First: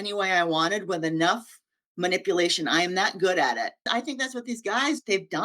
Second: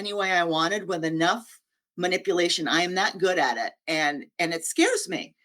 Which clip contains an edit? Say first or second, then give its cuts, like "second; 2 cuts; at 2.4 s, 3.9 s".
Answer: first; 1 cut; at 3.8 s